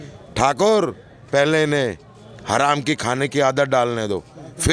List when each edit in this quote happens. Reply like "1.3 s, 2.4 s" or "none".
none